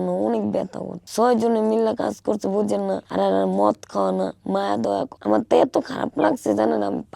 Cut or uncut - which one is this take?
cut